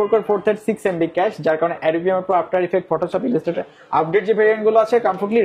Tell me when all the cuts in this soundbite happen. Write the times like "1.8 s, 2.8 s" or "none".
none

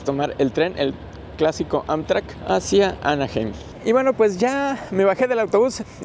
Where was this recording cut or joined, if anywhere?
3.7 s

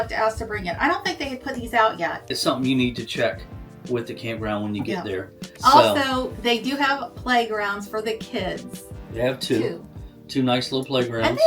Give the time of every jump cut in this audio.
2.2 s, 5.4 s

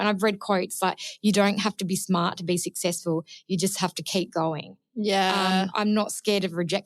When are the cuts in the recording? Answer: none

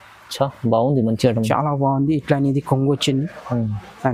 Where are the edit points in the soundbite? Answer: none

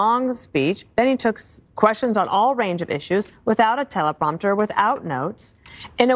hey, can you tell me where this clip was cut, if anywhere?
none

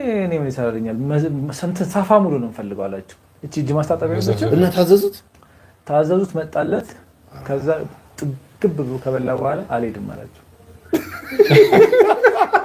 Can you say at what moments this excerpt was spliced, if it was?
none

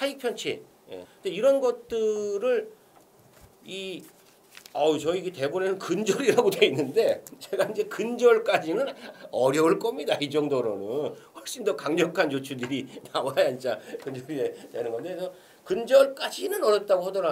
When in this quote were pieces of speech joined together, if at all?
1.0 s

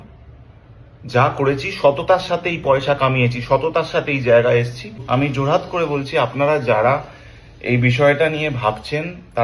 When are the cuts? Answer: 5.0 s

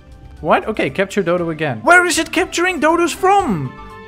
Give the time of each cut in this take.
1.8 s

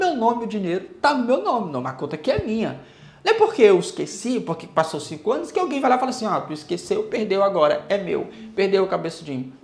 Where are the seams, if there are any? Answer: none

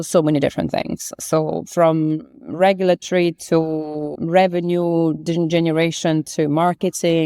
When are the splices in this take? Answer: 4.1 s

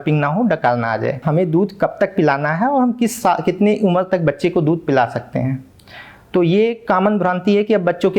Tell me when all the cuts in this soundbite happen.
none

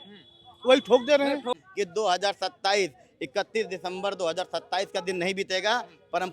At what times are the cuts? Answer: 1.6 s

